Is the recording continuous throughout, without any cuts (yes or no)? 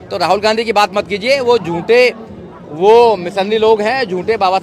yes